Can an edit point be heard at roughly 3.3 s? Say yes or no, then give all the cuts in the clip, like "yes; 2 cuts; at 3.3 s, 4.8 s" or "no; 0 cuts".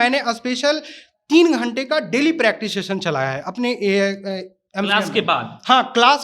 no; 0 cuts